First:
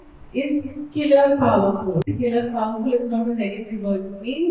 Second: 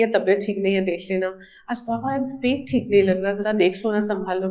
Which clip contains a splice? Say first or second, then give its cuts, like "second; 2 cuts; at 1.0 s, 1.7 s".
first; 1 cut; at 2.0 s